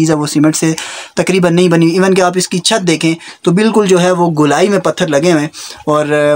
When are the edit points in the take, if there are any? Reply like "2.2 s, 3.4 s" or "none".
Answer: none

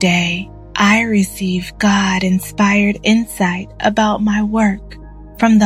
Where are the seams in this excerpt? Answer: none

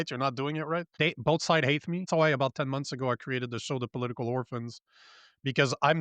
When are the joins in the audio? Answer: 0.9 s, 2.1 s

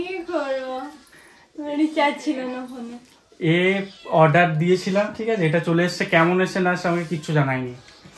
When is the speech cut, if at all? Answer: none

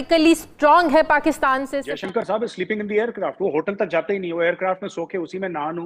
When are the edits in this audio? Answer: 1.7 s

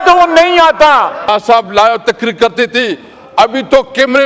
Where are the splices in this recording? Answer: 1.3 s

